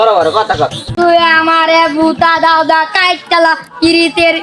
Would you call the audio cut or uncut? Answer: cut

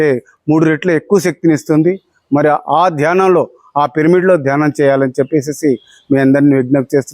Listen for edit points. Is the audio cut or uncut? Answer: uncut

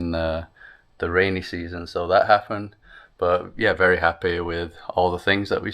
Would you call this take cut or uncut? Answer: uncut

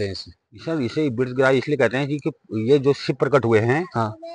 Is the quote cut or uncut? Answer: uncut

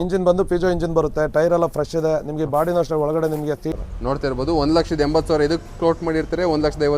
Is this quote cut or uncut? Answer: cut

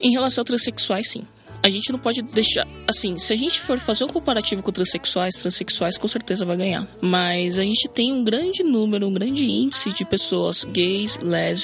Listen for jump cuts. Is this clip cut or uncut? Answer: cut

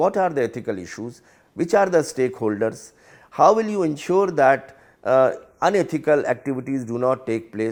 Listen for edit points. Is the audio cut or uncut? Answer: uncut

